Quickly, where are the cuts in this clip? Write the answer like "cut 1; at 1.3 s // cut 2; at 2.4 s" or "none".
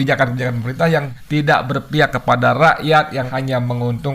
cut 1; at 1.1 s // cut 2; at 3.3 s

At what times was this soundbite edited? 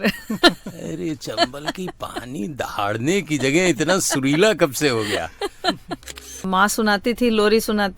cut 1; at 6.4 s

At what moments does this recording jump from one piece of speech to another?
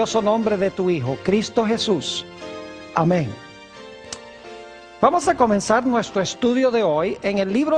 none

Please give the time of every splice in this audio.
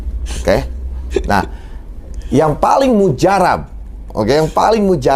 none

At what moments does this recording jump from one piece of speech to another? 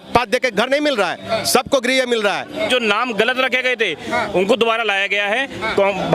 cut 1; at 2.5 s

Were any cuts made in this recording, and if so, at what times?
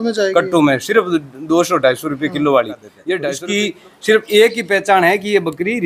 cut 1; at 3.4 s

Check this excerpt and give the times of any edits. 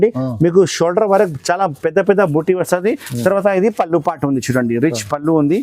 cut 1; at 3.1 s

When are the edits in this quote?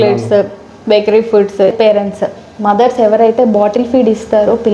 cut 1; at 1.7 s

